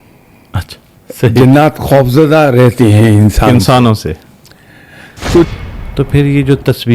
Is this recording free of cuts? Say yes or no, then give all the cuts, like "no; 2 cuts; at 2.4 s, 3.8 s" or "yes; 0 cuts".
no; 1 cut; at 5.5 s